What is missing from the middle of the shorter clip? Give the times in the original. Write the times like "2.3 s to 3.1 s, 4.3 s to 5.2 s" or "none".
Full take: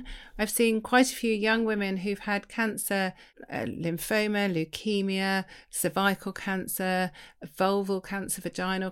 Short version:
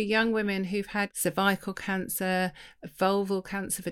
2.5 s to 5.7 s